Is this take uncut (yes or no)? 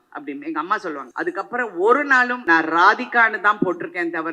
no